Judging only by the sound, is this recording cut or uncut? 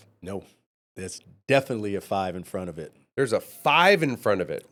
uncut